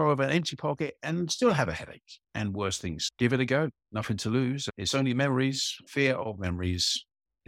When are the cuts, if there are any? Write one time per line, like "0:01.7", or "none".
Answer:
0:03.0
0:04.7
0:05.7